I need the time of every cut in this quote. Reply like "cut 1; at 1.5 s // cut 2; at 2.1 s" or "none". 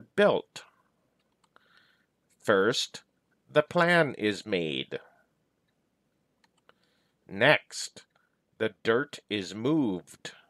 cut 1; at 1.3 s // cut 2; at 6.1 s